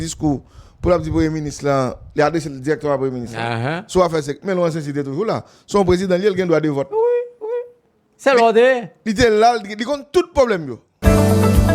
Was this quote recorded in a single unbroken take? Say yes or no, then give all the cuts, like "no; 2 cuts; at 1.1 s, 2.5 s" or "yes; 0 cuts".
no; 1 cut; at 10.8 s